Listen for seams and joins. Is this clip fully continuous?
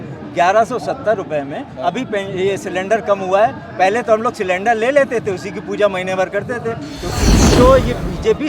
no; 1 cut; at 7.2 s

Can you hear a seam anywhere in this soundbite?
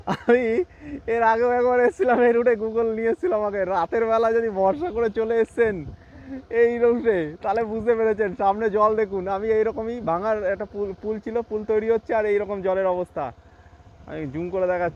no; 0 cuts

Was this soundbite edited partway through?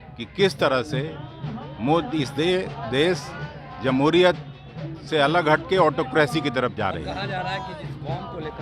no; 0 cuts

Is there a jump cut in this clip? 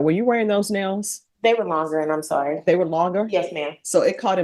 no; 0 cuts

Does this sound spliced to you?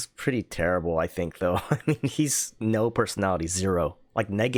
no; 0 cuts

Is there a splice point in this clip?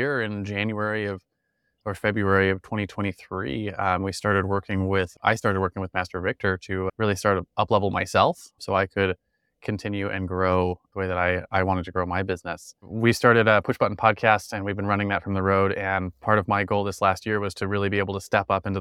no; 0 cuts

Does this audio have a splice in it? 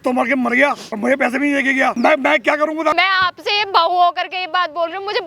yes; 3 cuts; at 0.9 s, 2.0 s, 2.9 s

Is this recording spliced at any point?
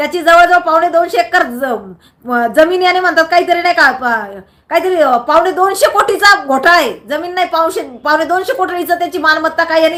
no; 0 cuts

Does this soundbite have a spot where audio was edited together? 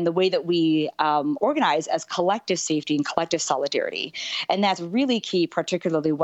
no; 0 cuts

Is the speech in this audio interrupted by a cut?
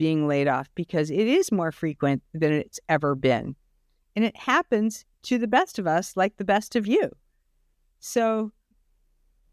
no; 0 cuts

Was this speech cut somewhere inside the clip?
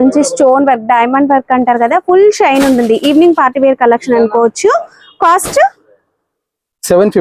no; 0 cuts

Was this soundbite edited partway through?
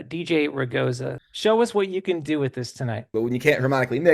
yes; 2 cuts; at 1.1 s, 3.1 s

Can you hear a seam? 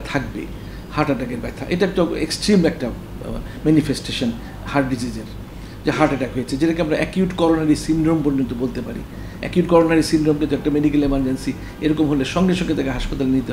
no; 0 cuts

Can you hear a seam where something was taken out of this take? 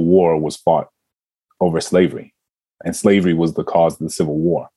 no; 0 cuts

